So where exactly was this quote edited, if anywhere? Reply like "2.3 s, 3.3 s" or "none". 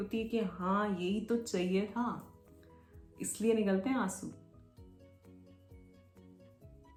none